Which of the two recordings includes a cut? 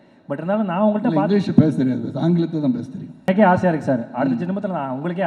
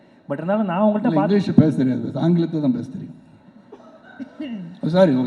first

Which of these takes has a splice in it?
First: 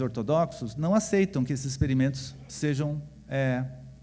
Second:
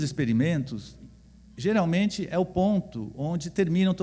second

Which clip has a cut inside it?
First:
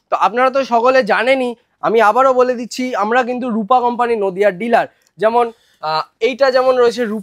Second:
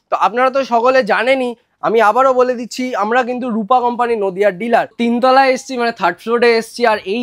second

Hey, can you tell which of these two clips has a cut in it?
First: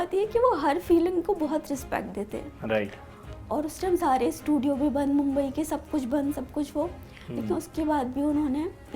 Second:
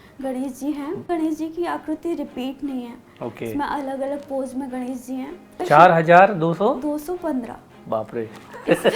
second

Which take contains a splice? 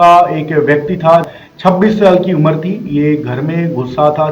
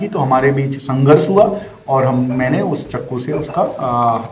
first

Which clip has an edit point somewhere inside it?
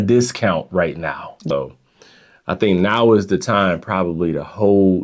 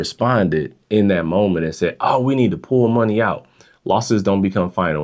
first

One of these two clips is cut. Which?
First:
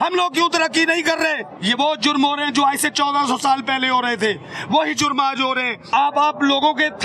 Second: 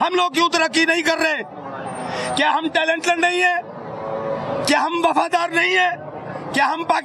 first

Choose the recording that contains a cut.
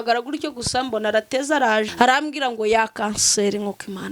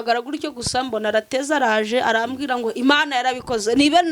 first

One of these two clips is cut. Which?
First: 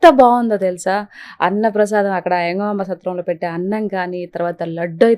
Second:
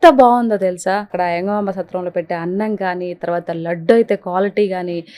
second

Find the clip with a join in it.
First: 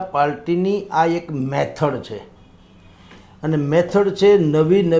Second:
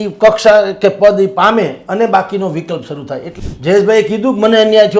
second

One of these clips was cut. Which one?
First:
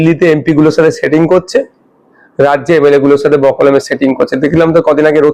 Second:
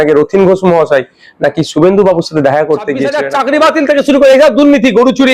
second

